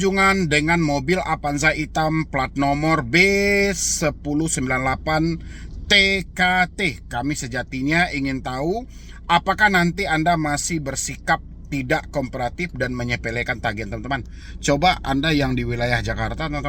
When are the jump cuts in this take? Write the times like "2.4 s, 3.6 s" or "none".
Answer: none